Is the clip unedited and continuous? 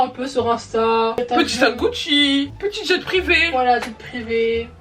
no; 1 cut; at 1.2 s

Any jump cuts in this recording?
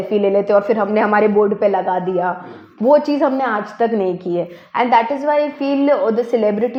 no; 0 cuts

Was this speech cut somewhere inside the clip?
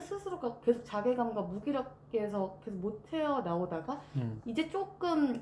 no; 0 cuts

